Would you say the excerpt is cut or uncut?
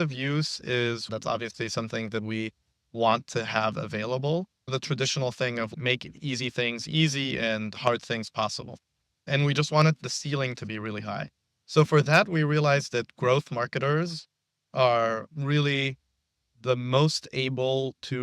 cut